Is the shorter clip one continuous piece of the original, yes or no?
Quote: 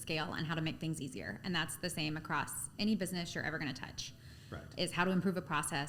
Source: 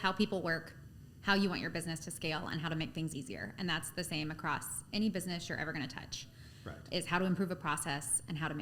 yes